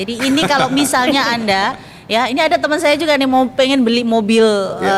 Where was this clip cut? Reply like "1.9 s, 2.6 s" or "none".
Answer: none